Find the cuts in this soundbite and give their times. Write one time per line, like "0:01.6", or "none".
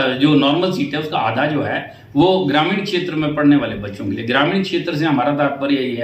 none